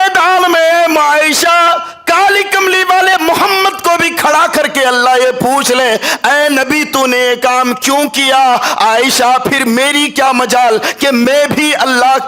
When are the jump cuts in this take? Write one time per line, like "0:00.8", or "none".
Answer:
none